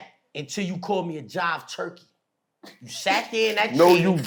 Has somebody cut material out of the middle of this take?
no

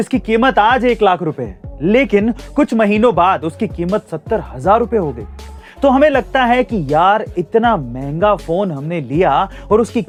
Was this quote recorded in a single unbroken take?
yes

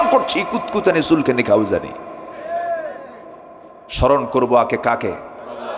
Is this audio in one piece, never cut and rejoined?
yes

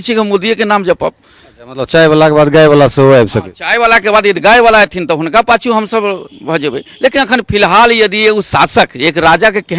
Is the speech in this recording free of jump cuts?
yes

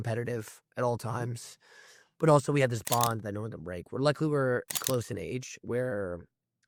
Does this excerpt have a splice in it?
no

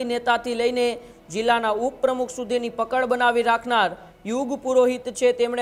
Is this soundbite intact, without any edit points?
yes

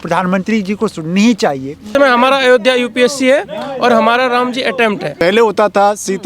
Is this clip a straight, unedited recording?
no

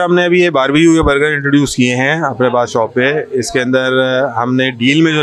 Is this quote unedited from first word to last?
yes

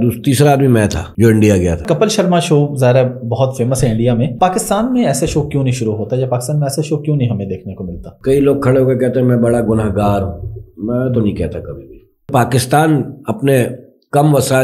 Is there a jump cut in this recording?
yes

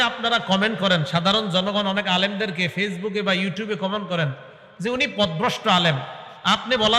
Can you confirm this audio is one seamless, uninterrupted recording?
yes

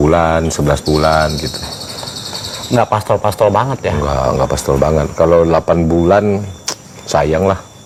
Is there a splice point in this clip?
no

